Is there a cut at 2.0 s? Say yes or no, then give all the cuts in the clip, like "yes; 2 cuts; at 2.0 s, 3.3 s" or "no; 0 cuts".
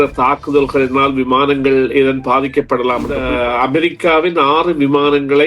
no; 1 cut; at 3.2 s